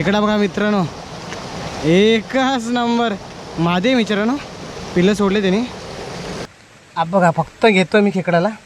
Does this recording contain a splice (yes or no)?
yes